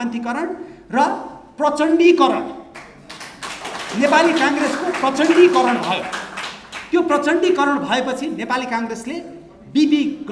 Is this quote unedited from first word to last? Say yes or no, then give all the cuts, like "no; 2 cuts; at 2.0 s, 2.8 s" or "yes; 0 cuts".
yes; 0 cuts